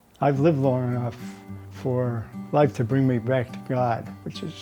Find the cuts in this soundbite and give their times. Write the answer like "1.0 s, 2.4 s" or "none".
1.3 s, 2.3 s